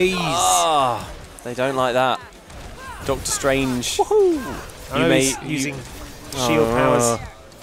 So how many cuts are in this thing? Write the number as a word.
zero